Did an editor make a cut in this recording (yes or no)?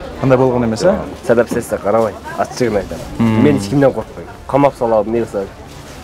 yes